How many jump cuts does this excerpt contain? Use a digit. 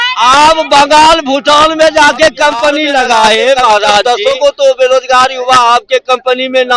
1